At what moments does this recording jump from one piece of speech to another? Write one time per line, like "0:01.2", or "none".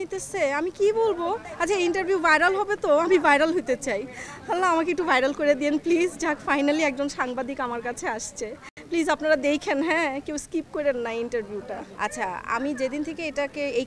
none